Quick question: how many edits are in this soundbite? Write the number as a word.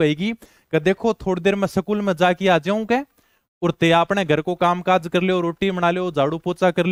zero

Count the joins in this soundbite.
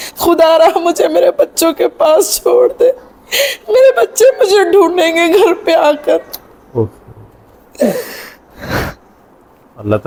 zero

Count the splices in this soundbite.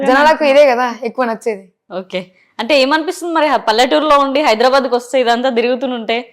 one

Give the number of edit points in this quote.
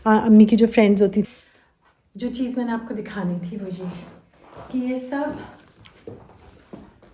one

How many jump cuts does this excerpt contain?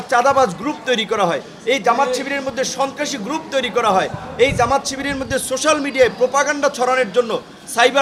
zero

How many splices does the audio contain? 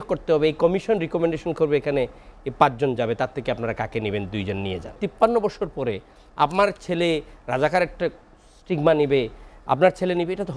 one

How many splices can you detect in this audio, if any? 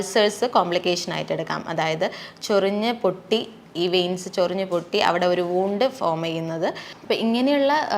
one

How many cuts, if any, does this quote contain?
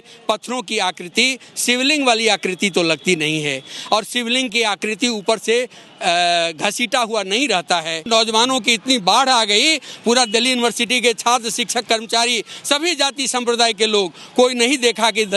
one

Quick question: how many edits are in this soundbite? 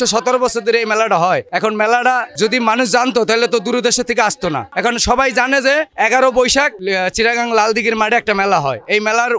zero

